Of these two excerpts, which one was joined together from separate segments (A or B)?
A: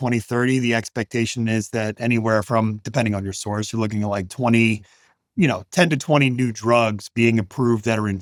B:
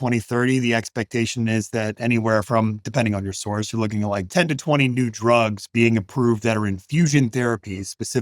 B